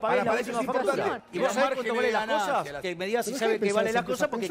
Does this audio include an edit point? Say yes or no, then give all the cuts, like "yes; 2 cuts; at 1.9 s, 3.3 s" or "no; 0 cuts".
yes; 2 cuts; at 1.2 s, 2.8 s